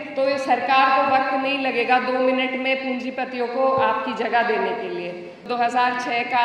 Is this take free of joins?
no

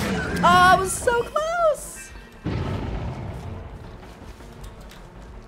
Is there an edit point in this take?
no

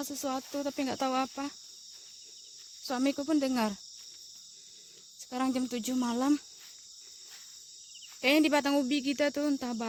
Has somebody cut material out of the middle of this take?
no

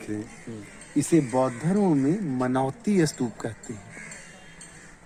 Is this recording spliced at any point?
no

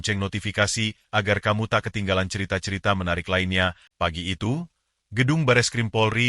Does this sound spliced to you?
yes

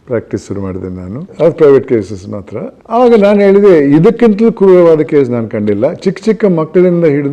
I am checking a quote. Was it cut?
yes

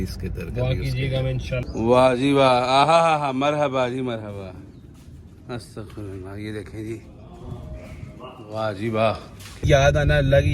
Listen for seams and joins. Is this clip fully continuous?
no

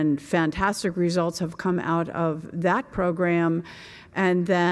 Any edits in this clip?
yes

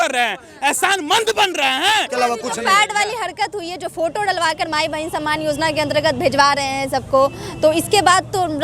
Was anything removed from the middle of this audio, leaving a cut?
yes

